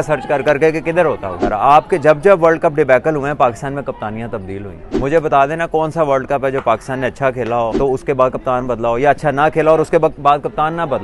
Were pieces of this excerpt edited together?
yes; 3 cuts; at 1.4 s, 4.8 s, 7.7 s

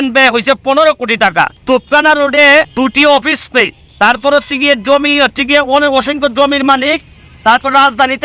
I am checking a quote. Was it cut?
yes; 3 cuts; at 1.6 s, 2.7 s, 3.8 s

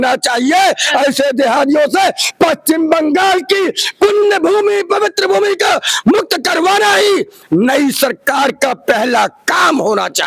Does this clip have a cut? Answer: no; 0 cuts

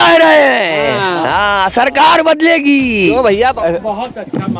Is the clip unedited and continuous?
no; 1 cut; at 3.4 s

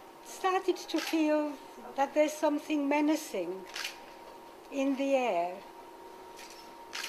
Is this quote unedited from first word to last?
yes; 0 cuts

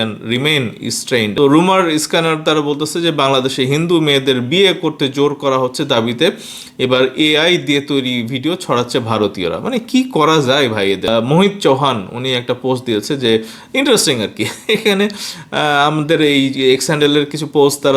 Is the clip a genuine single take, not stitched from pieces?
no; 2 cuts; at 1.3 s, 11.1 s

